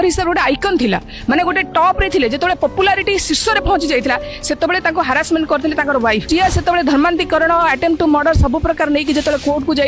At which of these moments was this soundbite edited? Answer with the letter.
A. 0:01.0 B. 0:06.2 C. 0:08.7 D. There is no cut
B